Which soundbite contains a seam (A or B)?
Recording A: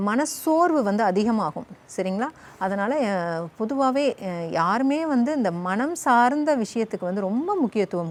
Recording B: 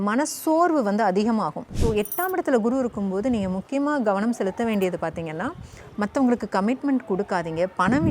B